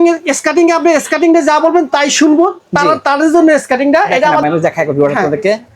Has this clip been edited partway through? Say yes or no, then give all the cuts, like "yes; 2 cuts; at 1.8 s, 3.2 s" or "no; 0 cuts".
yes; 1 cut; at 4.4 s